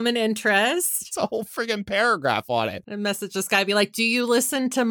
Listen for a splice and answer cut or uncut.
cut